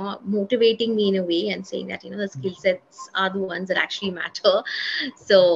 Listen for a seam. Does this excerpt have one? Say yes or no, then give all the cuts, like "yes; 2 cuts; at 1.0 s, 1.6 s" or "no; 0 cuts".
no; 0 cuts